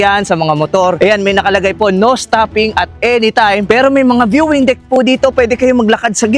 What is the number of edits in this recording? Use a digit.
2